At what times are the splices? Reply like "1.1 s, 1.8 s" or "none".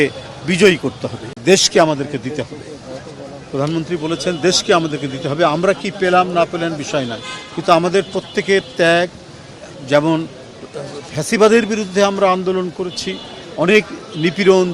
1.4 s